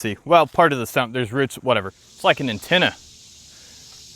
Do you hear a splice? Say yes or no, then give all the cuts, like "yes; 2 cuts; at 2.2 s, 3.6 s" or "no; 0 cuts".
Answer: yes; 1 cut; at 2.0 s